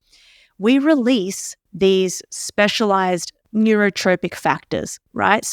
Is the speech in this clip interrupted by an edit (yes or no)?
yes